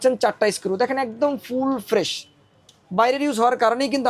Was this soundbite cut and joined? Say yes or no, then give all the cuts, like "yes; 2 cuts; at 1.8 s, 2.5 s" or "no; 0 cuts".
no; 0 cuts